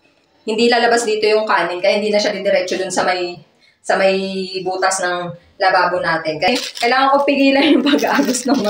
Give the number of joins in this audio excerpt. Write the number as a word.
one